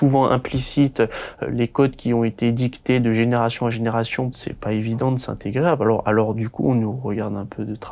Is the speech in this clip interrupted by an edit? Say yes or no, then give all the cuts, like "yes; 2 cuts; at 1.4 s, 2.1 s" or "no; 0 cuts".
yes; 1 cut; at 4.3 s